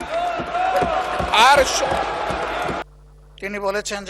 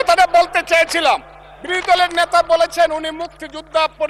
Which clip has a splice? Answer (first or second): first